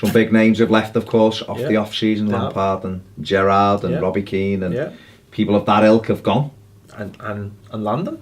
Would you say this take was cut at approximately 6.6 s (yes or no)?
no